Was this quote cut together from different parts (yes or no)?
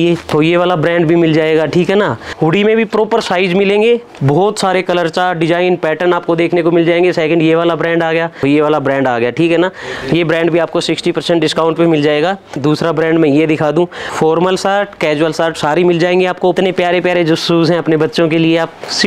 yes